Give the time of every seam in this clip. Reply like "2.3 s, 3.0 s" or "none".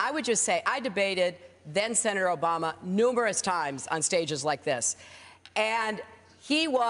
5.5 s